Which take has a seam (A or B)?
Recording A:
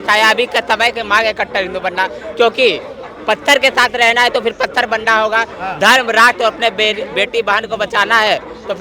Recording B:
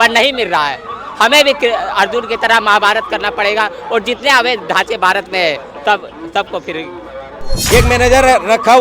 B